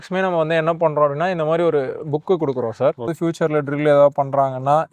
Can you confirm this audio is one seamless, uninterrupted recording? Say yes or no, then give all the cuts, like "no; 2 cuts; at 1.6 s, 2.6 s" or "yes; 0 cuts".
no; 1 cut; at 3.1 s